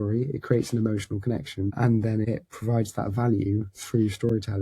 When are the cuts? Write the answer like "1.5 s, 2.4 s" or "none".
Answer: 1.7 s, 2.3 s